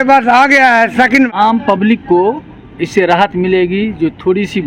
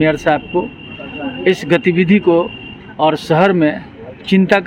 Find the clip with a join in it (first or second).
first